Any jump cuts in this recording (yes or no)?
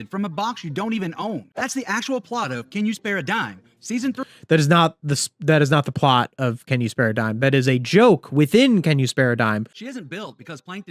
yes